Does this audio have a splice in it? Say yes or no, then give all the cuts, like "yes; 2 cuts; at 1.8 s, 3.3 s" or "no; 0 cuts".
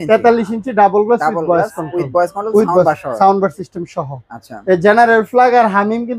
no; 0 cuts